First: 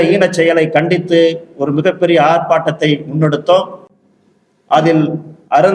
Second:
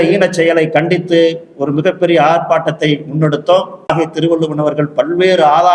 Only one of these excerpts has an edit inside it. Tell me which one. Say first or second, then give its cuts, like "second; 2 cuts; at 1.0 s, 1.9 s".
second; 1 cut; at 3.9 s